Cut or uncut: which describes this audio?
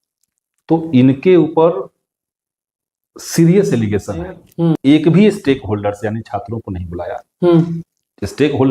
cut